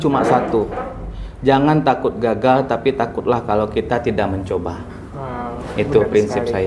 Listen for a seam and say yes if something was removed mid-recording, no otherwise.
no